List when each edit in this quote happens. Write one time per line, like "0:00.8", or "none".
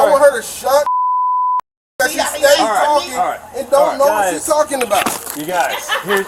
none